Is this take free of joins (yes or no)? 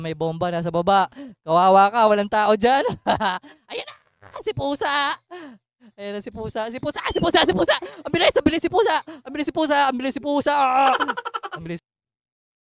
no